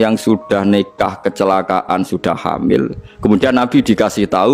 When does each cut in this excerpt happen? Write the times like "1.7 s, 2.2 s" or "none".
none